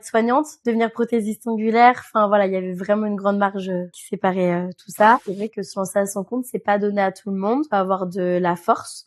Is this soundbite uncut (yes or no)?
no